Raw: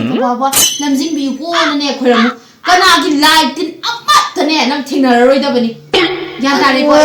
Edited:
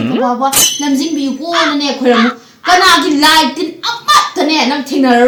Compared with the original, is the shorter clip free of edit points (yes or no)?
yes